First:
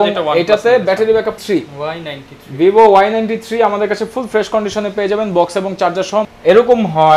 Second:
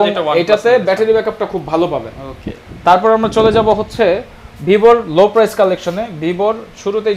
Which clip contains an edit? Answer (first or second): first